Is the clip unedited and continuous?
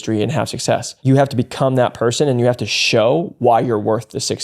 no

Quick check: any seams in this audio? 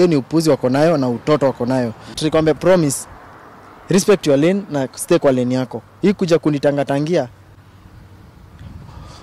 yes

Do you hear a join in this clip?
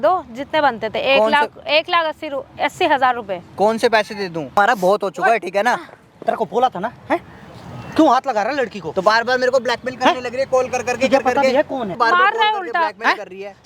yes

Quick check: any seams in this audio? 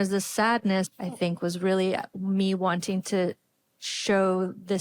yes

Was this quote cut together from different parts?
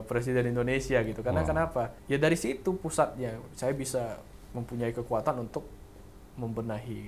yes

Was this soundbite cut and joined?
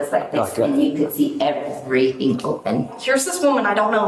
yes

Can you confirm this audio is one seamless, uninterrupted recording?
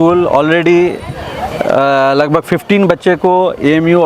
yes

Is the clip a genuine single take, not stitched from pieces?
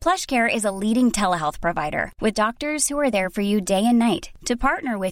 yes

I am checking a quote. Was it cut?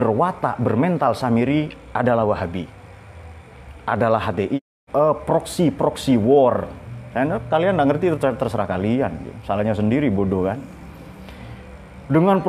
yes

